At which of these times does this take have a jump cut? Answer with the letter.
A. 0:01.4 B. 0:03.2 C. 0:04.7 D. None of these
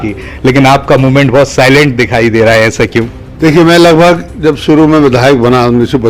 B